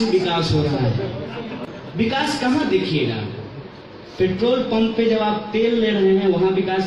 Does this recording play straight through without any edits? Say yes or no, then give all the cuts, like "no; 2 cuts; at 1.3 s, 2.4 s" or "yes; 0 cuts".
no; 1 cut; at 1.7 s